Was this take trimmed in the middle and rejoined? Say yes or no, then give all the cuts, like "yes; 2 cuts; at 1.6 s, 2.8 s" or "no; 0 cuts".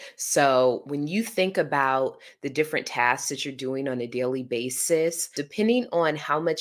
yes; 1 cut; at 5.4 s